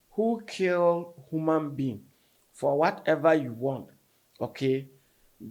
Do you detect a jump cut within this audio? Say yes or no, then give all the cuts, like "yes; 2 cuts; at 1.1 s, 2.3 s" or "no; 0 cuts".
no; 0 cuts